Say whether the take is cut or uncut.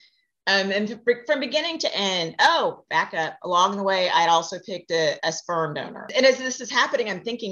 cut